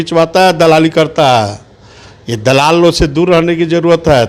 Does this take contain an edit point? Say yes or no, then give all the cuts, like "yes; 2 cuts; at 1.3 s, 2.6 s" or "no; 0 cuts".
no; 0 cuts